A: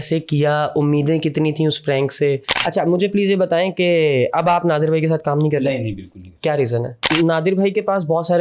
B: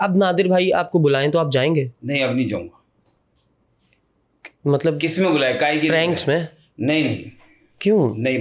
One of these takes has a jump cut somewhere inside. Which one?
A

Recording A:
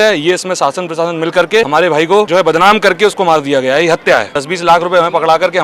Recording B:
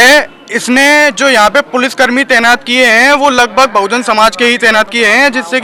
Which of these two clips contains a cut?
A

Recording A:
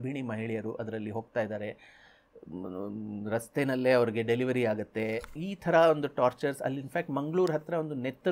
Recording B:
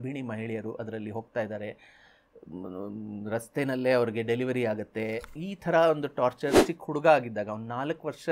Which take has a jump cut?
B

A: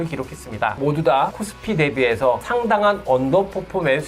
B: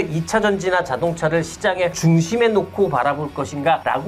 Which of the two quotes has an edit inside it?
A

